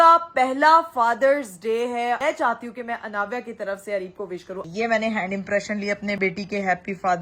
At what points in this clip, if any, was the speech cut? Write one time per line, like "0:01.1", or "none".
0:02.2
0:04.6
0:06.2